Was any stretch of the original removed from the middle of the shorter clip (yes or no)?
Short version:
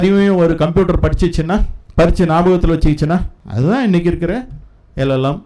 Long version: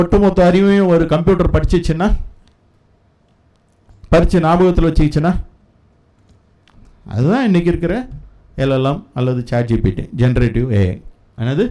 yes